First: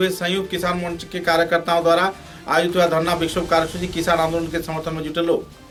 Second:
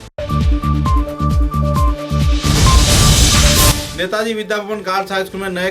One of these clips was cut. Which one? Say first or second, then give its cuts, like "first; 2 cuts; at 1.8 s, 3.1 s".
second; 1 cut; at 3.8 s